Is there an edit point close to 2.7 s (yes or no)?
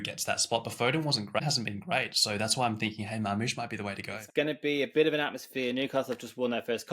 no